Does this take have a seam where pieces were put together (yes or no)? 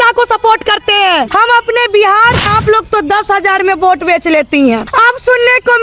yes